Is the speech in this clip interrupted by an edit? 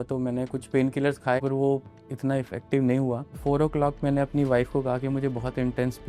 yes; 2 cuts; at 1.4 s, 3.3 s

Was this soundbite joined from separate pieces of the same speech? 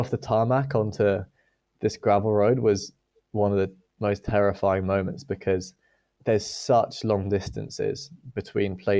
no; 0 cuts

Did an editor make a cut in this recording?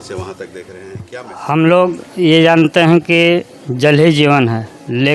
yes; 1 cut; at 1.0 s

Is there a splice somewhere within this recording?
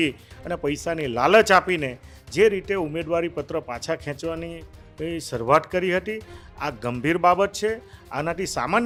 no; 0 cuts

